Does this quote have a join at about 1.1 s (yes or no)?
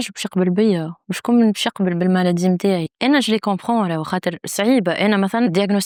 no